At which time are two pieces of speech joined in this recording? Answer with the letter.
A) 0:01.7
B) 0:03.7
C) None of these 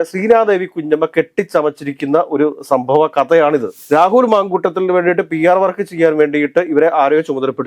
B